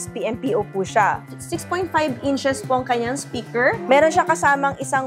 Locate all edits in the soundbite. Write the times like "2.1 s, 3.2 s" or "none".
3.8 s